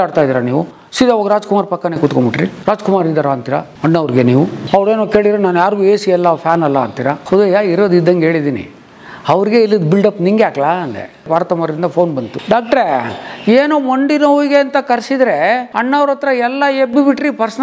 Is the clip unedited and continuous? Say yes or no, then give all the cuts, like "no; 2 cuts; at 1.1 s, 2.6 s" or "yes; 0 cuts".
no; 3 cuts; at 11.3 s, 12.3 s, 15.7 s